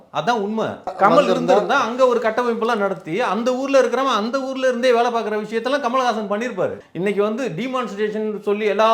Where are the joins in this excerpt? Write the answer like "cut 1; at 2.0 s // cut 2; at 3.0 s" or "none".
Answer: cut 1; at 0.9 s // cut 2; at 6.8 s